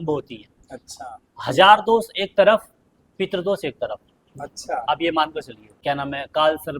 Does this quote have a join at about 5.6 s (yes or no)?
yes